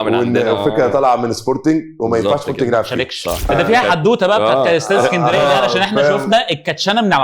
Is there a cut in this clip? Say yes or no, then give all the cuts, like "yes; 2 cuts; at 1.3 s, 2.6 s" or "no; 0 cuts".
yes; 1 cut; at 3.5 s